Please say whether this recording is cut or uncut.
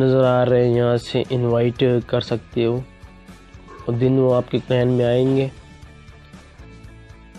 cut